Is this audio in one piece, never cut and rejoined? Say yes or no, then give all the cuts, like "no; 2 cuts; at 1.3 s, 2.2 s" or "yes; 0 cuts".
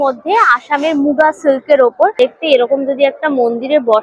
no; 1 cut; at 2.2 s